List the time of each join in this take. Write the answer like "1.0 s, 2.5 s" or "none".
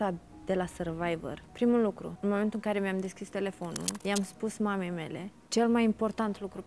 1.4 s, 2.1 s, 3.9 s, 5.4 s